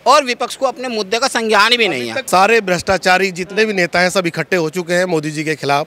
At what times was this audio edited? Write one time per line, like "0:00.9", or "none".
0:02.2